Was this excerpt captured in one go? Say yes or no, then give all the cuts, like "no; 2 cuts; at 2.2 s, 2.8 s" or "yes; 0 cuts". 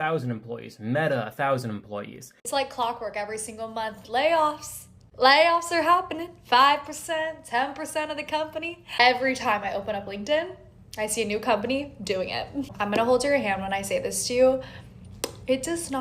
no; 1 cut; at 2.3 s